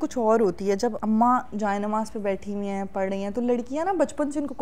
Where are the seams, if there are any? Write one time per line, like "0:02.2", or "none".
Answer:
0:01.0